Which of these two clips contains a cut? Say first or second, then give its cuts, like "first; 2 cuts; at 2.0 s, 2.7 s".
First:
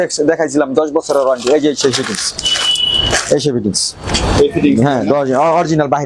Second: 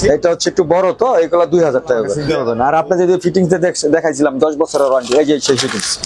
second; 1 cut; at 2.2 s